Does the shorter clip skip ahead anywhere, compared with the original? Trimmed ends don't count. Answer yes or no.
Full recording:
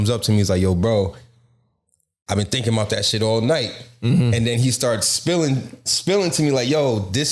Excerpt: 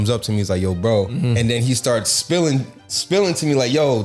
yes